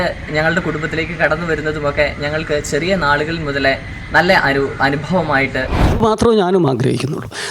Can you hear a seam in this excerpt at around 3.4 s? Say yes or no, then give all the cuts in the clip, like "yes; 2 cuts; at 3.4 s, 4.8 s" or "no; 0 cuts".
no; 1 cut; at 6.0 s